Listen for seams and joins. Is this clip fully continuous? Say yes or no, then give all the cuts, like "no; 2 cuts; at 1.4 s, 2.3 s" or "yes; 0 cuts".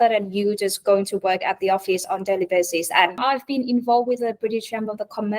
no; 1 cut; at 3.2 s